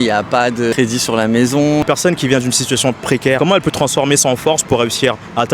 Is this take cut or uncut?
cut